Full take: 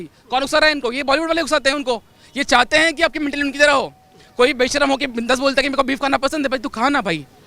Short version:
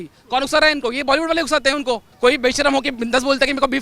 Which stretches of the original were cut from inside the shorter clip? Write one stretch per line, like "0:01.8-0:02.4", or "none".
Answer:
0:02.1-0:04.2